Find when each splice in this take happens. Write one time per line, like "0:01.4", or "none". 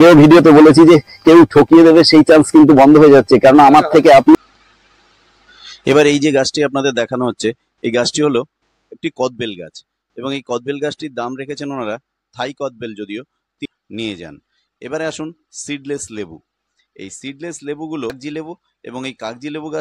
0:04.4
0:13.7
0:18.2